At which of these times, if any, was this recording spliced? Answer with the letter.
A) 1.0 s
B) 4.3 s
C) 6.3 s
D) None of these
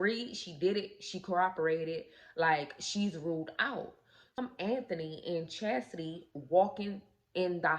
B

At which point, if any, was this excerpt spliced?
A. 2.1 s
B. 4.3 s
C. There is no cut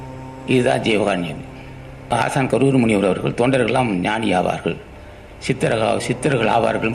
A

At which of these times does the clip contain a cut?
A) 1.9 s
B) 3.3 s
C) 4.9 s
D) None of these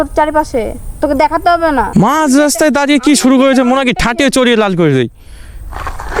A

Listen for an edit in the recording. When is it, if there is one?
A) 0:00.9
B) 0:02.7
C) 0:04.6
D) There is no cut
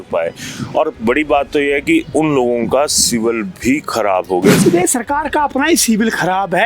C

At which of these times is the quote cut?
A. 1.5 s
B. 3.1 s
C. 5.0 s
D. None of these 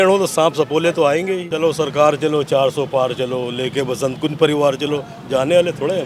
A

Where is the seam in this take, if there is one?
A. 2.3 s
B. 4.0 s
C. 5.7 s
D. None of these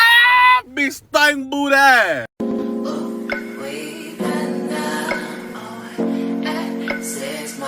A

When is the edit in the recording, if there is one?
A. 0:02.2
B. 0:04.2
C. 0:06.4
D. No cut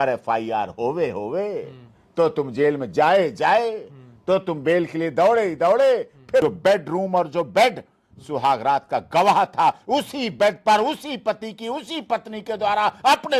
C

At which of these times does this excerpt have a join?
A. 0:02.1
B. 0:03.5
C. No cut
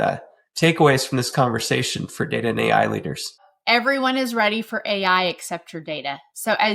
B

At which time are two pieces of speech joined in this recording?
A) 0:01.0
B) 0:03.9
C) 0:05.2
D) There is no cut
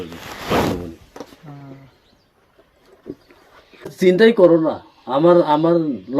B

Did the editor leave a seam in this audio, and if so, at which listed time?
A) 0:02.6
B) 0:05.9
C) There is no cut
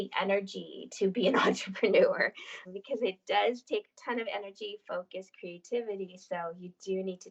A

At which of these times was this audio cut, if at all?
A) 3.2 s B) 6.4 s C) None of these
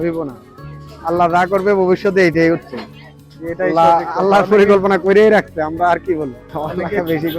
B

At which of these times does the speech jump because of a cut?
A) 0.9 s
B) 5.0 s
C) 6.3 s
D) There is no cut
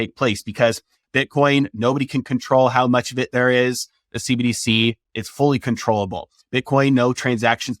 A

